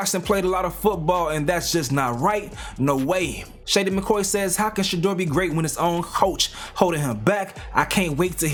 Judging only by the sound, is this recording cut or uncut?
uncut